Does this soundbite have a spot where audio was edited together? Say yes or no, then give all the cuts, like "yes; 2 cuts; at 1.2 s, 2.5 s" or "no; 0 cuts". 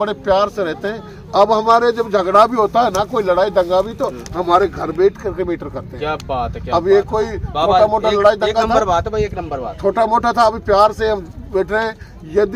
no; 0 cuts